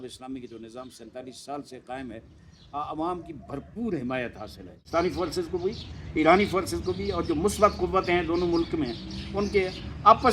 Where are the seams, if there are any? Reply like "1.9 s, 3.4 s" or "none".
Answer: 4.9 s